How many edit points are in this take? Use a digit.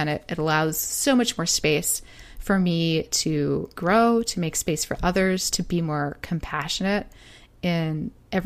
1